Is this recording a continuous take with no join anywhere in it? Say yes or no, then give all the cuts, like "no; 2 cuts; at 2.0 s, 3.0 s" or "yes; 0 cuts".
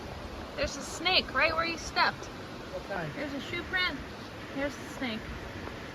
yes; 0 cuts